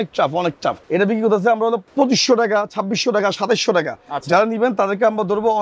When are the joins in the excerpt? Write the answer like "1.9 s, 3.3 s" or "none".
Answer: 0.8 s, 1.8 s